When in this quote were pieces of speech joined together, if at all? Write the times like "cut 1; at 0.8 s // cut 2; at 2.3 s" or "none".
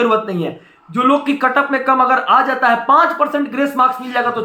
none